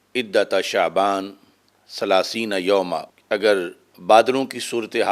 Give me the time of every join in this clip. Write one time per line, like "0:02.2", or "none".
0:03.1
0:03.9